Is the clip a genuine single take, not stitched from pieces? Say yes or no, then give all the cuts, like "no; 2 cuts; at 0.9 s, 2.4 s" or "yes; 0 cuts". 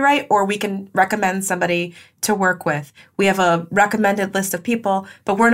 yes; 0 cuts